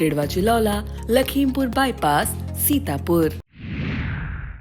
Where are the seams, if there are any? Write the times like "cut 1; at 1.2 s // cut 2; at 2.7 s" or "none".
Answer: cut 1; at 3.5 s